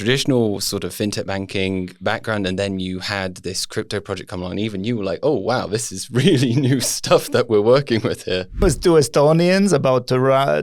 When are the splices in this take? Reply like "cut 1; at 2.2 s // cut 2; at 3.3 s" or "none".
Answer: cut 1; at 8.6 s